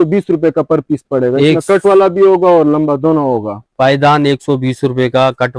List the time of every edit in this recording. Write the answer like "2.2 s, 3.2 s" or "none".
none